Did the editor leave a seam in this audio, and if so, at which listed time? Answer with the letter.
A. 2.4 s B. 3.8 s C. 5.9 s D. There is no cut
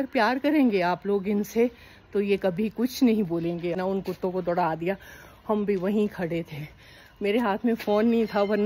B